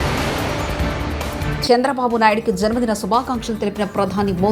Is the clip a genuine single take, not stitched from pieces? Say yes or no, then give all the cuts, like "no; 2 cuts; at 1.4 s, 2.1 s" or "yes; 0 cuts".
yes; 0 cuts